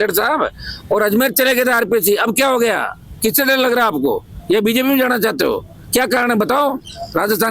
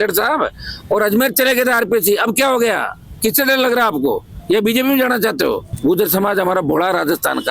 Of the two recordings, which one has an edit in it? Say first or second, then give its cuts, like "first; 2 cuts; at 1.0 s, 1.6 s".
second; 1 cut; at 5.7 s